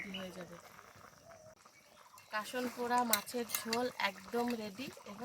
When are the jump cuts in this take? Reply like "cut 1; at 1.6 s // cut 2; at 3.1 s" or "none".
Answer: cut 1; at 1.7 s